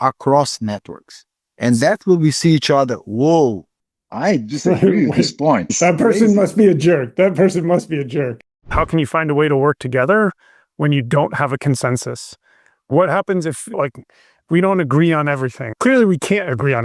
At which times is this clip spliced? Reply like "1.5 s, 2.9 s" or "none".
5.8 s, 8.7 s, 13.8 s, 15.7 s